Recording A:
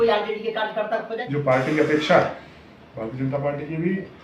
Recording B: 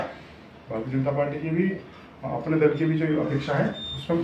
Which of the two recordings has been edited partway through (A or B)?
A